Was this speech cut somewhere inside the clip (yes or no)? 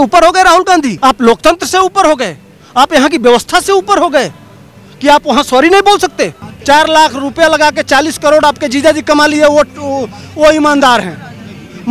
yes